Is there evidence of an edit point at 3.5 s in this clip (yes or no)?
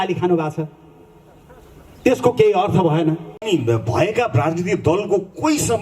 yes